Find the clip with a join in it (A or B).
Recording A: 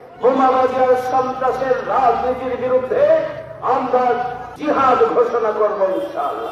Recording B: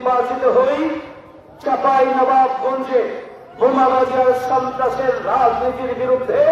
A